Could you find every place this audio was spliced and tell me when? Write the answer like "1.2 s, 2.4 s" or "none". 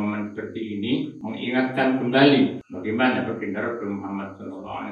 1.2 s, 2.7 s